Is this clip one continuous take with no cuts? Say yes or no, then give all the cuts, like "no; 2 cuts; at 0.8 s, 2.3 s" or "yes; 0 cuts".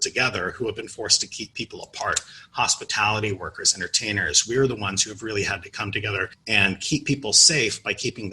no; 1 cut; at 6.4 s